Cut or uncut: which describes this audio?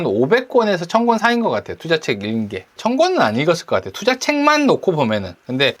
uncut